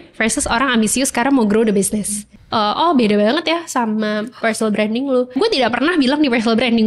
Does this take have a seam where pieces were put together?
yes; 2 cuts; at 2.3 s, 5.3 s

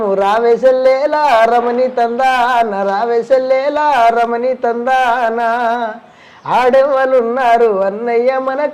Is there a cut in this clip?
no; 0 cuts

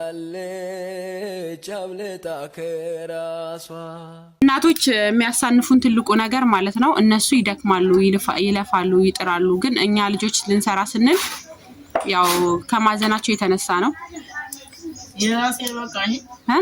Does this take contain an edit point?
no; 0 cuts

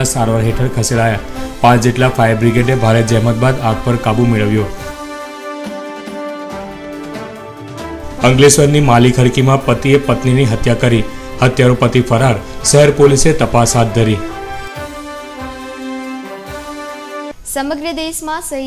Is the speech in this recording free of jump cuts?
no; 1 cut; at 17.4 s

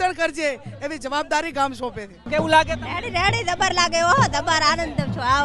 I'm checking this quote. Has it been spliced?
yes; 1 cut; at 2.3 s

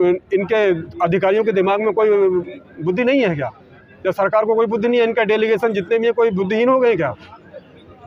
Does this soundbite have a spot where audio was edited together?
no; 0 cuts

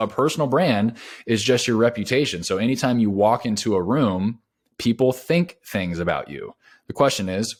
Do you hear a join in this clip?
no; 0 cuts

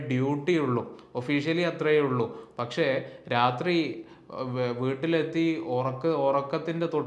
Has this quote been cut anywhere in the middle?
no; 0 cuts

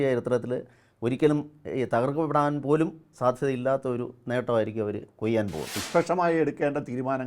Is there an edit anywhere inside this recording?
yes; 1 cut; at 5.7 s

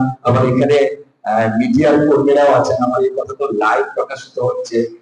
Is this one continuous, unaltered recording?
yes; 0 cuts

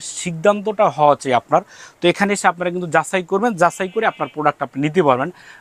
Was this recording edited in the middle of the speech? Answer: no; 0 cuts

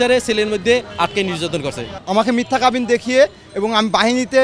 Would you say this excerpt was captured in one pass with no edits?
no; 1 cut; at 1.9 s

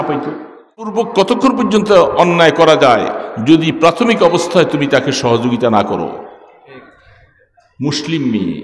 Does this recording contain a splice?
yes; 1 cut; at 1.0 s

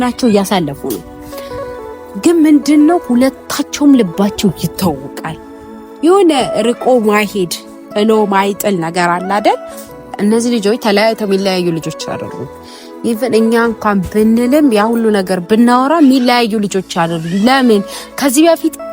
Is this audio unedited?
no; 1 cut; at 10.1 s

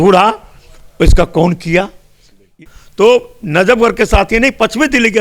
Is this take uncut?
no; 1 cut; at 2.5 s

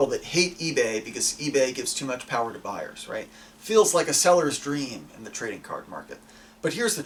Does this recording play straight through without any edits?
yes; 0 cuts

